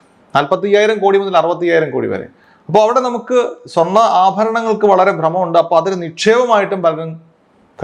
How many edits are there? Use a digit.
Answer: 0